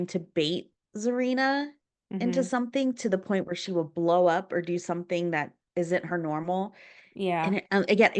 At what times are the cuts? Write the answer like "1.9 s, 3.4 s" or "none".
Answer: none